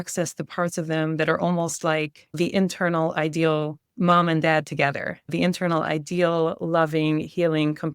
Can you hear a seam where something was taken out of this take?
yes; 1 cut; at 3.8 s

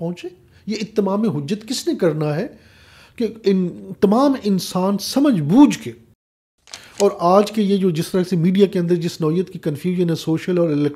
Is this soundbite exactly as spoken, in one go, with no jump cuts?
no; 1 cut; at 6.4 s

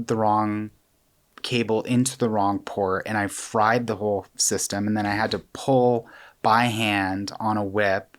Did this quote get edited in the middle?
no; 0 cuts

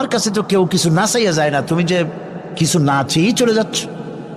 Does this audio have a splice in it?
no; 0 cuts

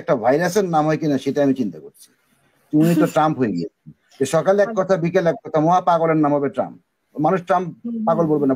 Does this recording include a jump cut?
no; 0 cuts

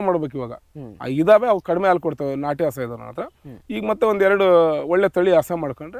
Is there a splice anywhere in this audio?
no; 0 cuts

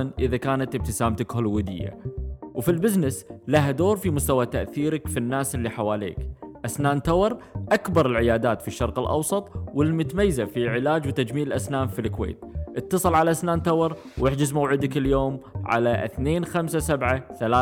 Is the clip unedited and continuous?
yes; 0 cuts

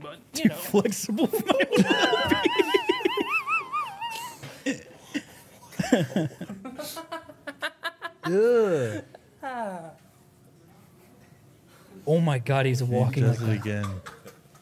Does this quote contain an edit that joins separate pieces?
no; 0 cuts

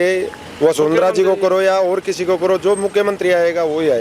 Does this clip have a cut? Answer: no; 0 cuts

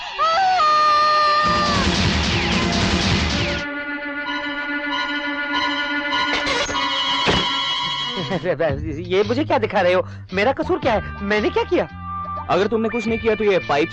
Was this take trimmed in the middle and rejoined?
yes; 1 cut; at 8.1 s

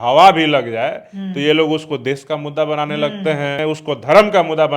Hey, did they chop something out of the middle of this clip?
yes; 1 cut; at 3.6 s

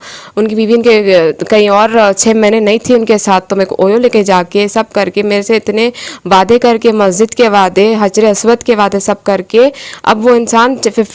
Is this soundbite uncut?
yes; 0 cuts

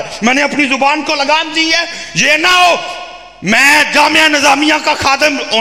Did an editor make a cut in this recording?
no; 0 cuts

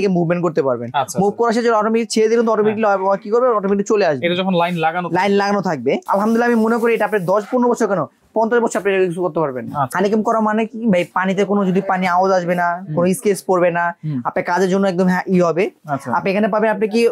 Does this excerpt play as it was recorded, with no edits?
no; 2 cuts; at 6.1 s, 9.9 s

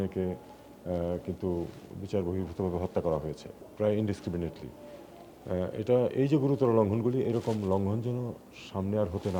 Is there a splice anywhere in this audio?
yes; 1 cut; at 3.6 s

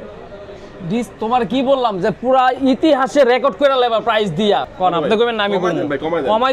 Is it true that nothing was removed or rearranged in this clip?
no; 1 cut; at 4.7 s

